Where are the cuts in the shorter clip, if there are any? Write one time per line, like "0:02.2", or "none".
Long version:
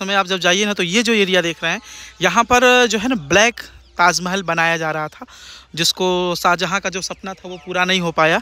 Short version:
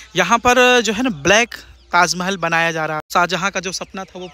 0:03.1